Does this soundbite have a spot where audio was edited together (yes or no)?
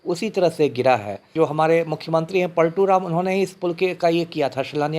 yes